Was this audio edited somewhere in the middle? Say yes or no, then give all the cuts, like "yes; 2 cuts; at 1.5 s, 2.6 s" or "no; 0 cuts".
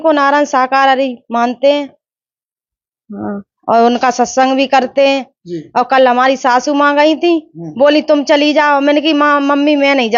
no; 0 cuts